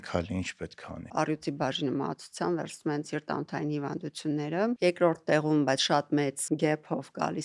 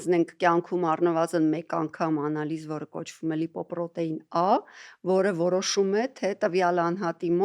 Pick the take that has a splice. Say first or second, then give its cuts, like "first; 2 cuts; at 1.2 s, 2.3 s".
first; 3 cuts; at 1.1 s, 4.8 s, 6.4 s